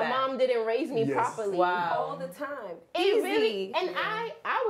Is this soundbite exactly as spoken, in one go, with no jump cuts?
yes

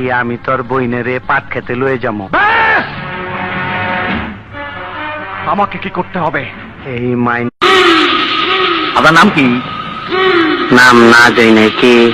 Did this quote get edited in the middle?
yes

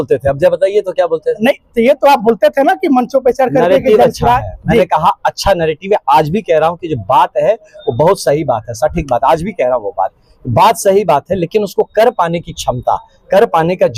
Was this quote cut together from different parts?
no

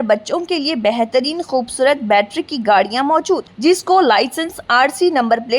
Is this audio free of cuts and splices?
yes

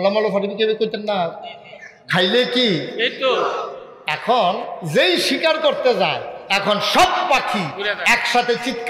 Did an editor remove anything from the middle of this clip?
no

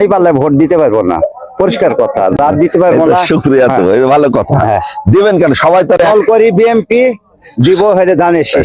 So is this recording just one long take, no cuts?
yes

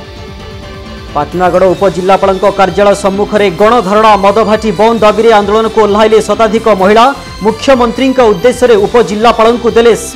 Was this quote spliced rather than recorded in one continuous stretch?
yes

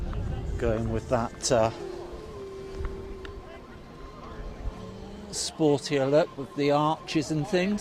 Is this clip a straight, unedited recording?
yes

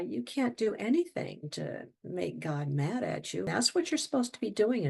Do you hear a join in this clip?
yes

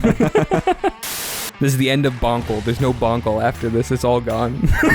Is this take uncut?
no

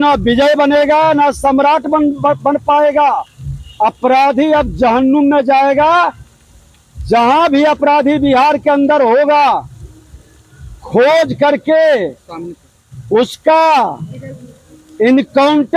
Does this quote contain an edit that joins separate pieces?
no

